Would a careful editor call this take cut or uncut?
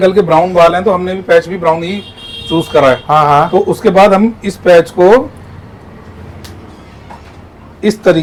uncut